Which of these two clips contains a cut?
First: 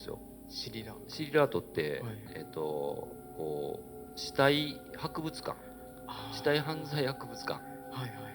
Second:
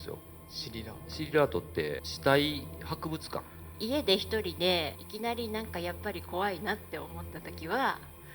second; 3 cuts; at 2.1 s, 3.7 s, 4.9 s

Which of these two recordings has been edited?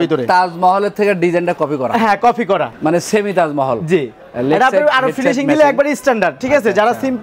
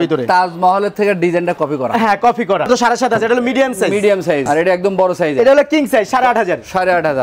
second; 2 cuts; at 2.7 s, 4.4 s

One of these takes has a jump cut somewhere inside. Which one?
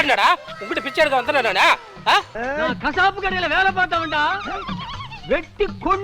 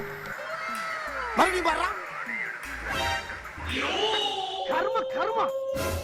first; 1 cut; at 2.3 s

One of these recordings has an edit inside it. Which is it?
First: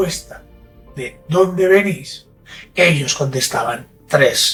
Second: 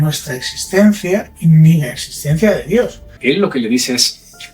second; 1 cut; at 3.1 s

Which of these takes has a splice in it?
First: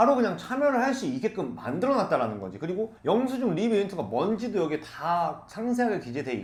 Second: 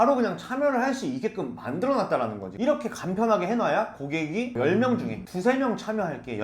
second; 1 cut; at 2.5 s

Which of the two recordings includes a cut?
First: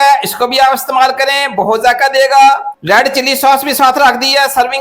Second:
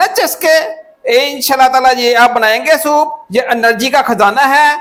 first; 1 cut; at 2.7 s

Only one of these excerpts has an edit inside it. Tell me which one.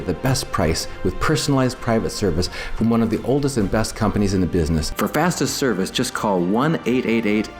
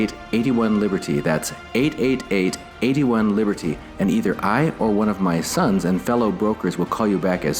first; 1 cut; at 4.9 s

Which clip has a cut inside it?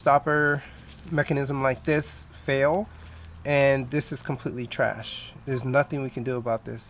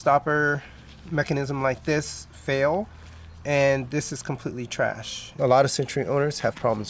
second; 1 cut; at 5.2 s

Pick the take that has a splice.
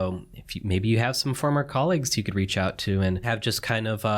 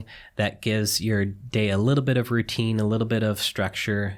first; 1 cut; at 3.2 s

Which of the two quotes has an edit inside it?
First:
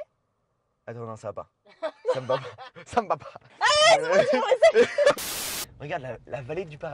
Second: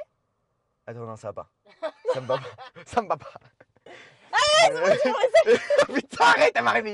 first; 2 cuts; at 3.4 s, 5.3 s

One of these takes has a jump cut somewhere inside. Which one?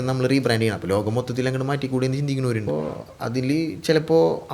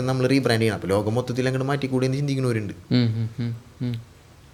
first; 1 cut; at 2.6 s

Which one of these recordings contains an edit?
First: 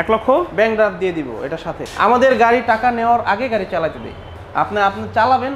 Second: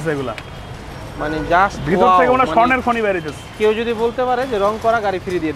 first; 2 cuts; at 1.8 s, 4.3 s

